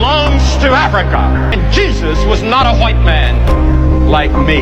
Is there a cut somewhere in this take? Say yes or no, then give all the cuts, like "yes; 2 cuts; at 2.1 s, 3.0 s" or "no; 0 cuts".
yes; 1 cut; at 1.5 s